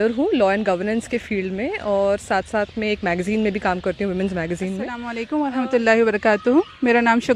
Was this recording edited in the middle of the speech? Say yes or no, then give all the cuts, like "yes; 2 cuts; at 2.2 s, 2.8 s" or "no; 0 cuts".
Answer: yes; 1 cut; at 5.2 s